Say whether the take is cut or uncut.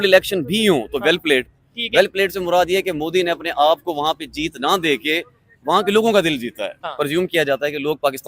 cut